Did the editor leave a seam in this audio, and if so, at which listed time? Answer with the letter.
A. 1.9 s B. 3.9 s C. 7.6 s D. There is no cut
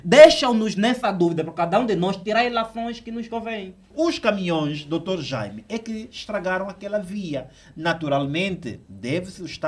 B